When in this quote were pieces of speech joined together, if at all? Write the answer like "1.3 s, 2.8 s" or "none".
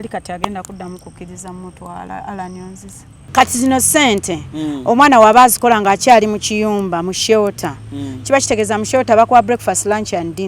3.2 s